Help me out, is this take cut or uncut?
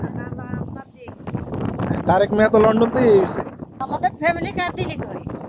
cut